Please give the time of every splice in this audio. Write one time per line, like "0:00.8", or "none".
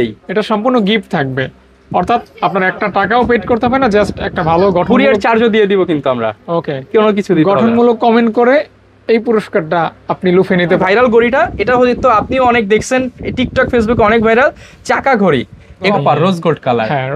0:10.8
0:15.9

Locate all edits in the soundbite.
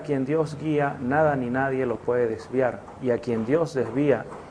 0:01.3

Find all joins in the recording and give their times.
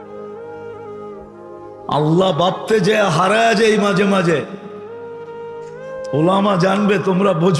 0:04.7
0:06.1

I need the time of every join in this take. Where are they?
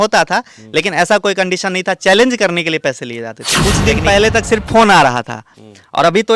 0:03.4

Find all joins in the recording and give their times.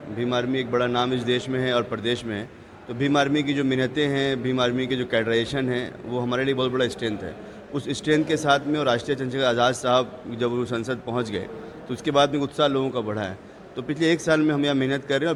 none

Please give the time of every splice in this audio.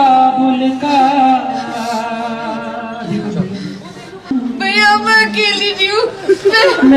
0:04.3

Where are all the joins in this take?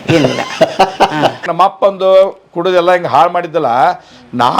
0:01.4

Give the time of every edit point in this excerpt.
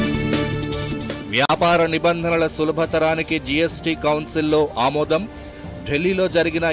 0:01.1

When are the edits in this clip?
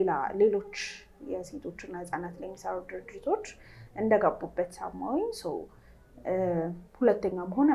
none

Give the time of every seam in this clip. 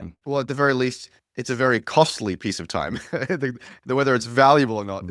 none

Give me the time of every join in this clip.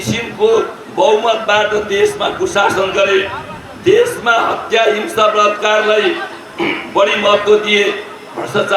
none

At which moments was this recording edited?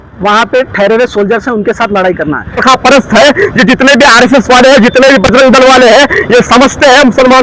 0:02.6

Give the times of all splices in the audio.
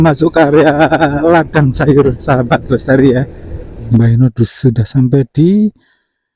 0:03.8

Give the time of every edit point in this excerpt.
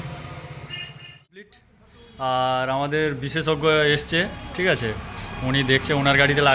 0:01.6

